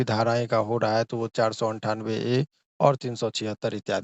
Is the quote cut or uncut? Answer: uncut